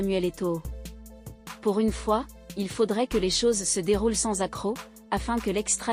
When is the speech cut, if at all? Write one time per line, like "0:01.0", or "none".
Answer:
none